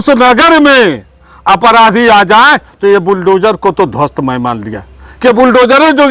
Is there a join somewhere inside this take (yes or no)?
no